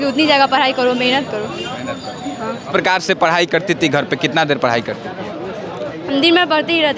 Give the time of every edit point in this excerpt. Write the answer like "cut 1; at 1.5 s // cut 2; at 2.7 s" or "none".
cut 1; at 2.7 s